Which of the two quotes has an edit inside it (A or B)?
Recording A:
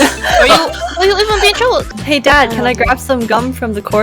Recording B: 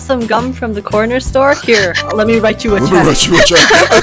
A